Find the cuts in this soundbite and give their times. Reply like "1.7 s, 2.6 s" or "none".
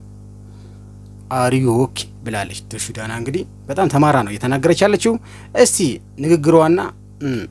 none